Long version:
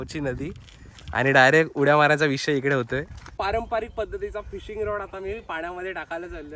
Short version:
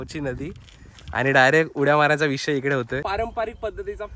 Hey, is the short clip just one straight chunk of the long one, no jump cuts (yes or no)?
no